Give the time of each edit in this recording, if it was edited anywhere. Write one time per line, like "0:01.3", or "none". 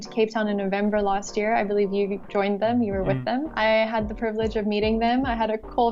0:03.5